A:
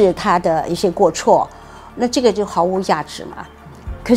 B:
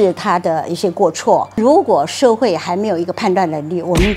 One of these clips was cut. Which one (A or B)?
B